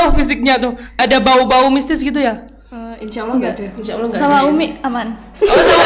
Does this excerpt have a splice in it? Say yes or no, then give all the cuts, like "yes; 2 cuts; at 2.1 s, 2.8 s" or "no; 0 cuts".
yes; 1 cut; at 1.0 s